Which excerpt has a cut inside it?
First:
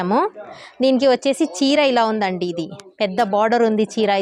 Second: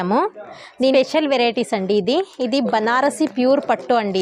second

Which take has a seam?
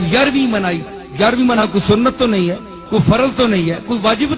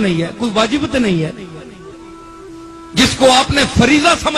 first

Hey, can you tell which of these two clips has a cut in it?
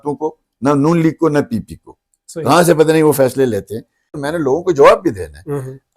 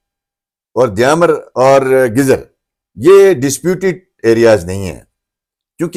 first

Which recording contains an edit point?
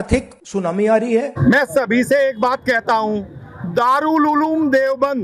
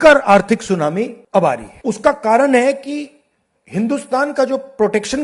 first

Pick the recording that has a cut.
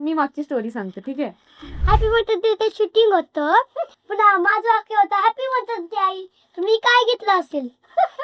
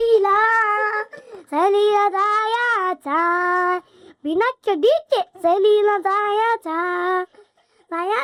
first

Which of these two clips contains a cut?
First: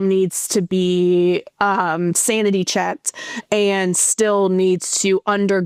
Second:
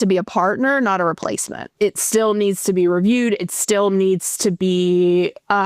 second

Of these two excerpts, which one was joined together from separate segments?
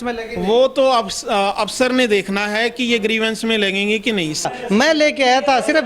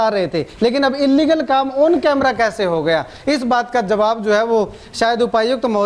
first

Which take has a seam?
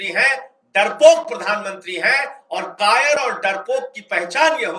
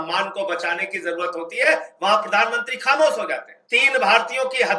second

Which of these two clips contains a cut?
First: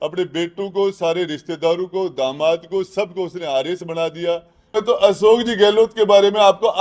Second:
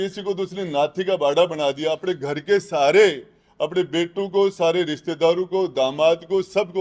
first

